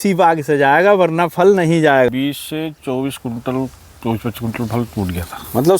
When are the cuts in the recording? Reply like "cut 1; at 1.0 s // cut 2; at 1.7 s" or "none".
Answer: cut 1; at 2.1 s